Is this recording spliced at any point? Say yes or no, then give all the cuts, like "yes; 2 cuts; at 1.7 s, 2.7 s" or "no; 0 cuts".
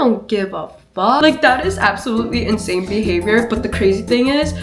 yes; 1 cut; at 1.2 s